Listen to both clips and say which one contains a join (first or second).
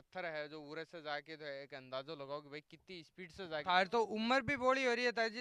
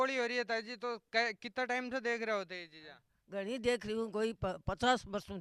first